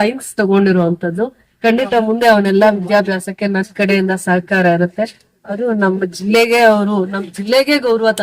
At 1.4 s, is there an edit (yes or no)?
no